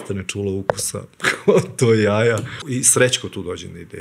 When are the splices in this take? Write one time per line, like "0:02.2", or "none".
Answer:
0:02.6